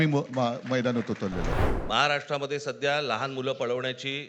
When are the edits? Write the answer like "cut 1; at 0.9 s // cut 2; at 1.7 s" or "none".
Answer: cut 1; at 1.7 s